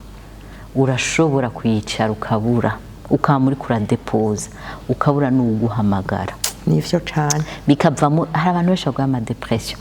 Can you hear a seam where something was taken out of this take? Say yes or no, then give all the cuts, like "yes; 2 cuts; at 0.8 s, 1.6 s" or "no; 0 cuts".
no; 0 cuts